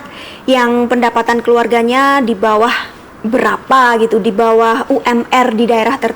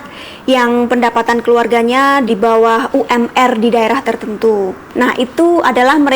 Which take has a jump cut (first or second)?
second